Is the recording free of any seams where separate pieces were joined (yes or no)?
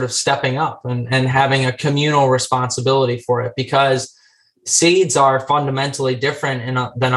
yes